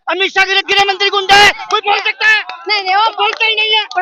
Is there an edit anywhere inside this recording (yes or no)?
no